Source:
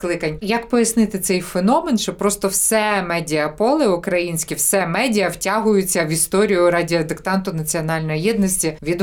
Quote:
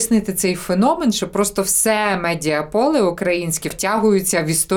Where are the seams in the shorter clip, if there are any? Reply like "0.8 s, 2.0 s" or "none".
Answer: 3.8 s

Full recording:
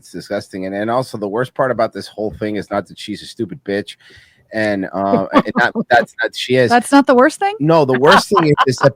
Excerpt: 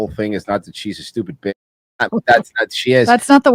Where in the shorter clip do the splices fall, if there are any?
2.1 s

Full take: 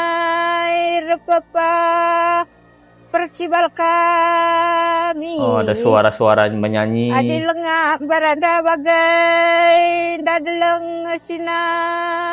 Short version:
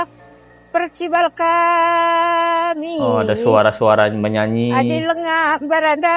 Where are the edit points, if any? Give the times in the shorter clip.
none

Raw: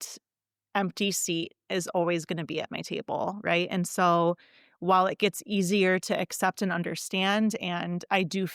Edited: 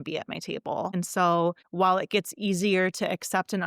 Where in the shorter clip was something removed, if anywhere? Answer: 0.9 s, 1.6 s

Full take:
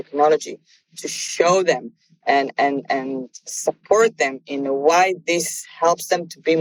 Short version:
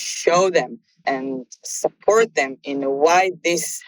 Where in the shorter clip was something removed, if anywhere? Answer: 1.0 s

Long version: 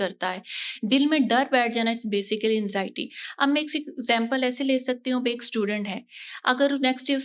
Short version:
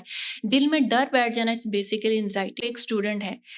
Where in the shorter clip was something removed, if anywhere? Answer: 2.6 s

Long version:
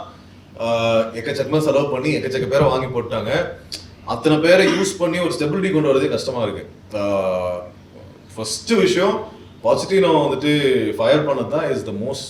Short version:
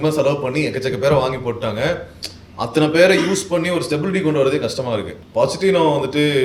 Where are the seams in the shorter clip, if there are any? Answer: 5.2 s

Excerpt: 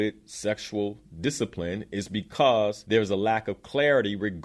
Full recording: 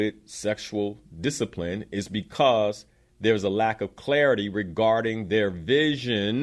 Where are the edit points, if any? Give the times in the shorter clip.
2.8 s

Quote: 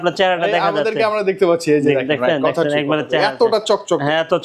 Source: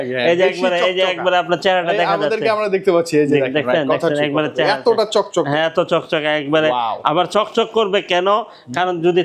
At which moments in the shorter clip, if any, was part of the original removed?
none

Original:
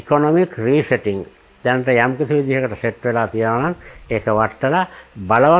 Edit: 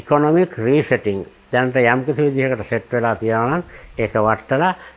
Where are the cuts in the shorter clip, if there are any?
1.3 s

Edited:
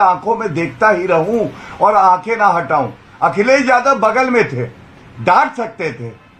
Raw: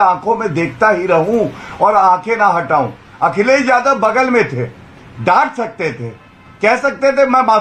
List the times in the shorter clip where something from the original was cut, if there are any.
none

